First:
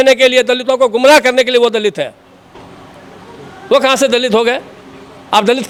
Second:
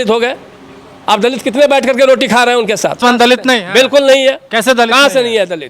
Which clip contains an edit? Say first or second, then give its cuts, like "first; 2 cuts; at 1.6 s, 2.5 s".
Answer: second; 1 cut; at 3.0 s